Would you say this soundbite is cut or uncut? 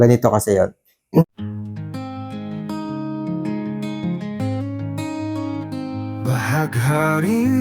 cut